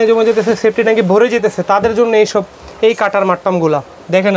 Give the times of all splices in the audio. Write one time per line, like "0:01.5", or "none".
none